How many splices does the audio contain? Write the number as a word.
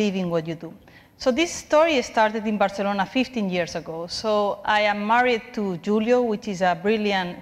zero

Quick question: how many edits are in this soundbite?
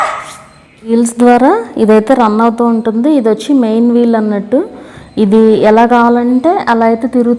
one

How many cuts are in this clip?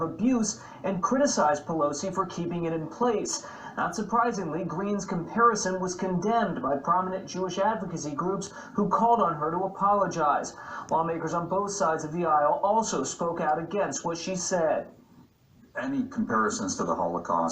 one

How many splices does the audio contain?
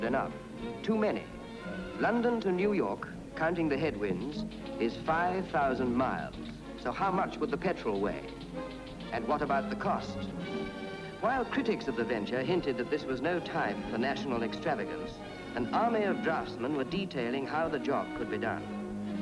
one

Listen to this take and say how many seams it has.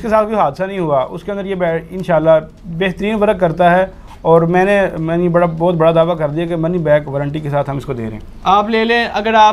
zero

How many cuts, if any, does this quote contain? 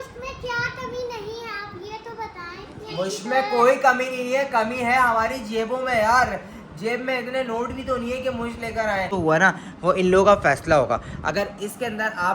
one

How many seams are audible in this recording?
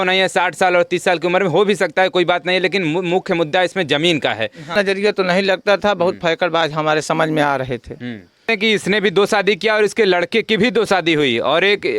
two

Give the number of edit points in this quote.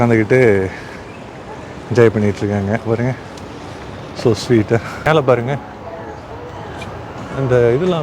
one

